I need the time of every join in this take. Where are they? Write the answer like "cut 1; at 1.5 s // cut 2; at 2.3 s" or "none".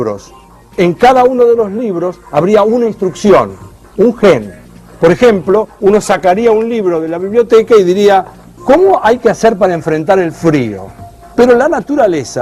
cut 1; at 1.3 s